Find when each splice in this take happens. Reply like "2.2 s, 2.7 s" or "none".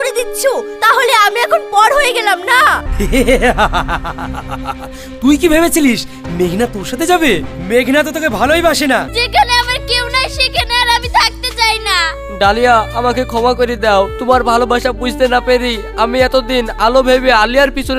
2.9 s, 9.1 s